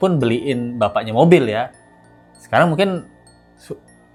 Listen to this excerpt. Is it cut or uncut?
uncut